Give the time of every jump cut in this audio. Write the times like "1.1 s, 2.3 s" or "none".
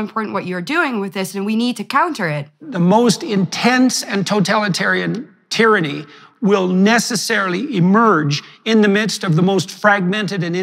2.6 s